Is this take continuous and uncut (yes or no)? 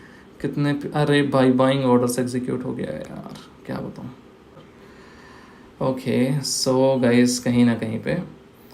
no